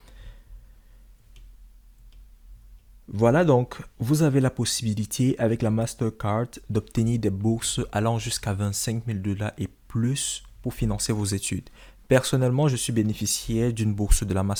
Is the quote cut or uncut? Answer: uncut